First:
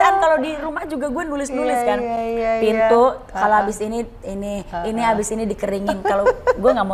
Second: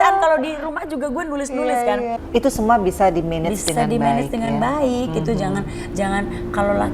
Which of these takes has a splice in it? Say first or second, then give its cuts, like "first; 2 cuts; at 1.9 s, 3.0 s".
second; 1 cut; at 2.2 s